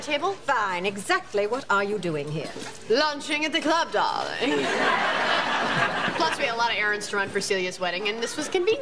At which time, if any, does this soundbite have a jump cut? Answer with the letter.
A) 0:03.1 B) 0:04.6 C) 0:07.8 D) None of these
B